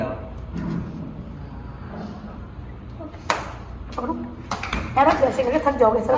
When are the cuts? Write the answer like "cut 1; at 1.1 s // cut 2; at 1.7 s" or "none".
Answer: none

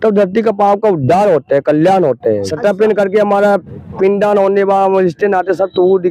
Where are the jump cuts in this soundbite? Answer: cut 1; at 2.5 s

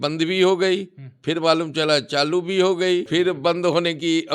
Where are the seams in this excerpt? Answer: cut 1; at 3.1 s

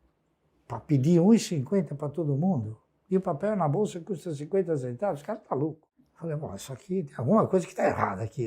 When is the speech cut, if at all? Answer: cut 1; at 5.9 s

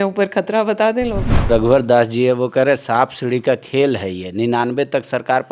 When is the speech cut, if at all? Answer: cut 1; at 1.4 s

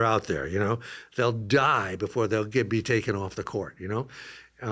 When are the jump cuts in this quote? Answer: none

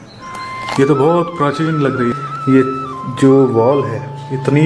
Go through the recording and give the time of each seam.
cut 1; at 2.1 s

